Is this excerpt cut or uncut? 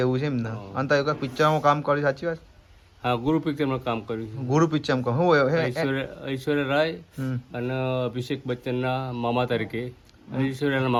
uncut